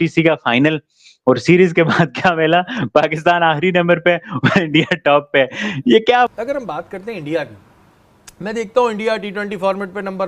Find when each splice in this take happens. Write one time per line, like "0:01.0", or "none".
0:06.3